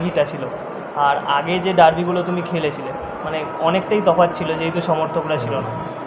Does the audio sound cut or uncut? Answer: uncut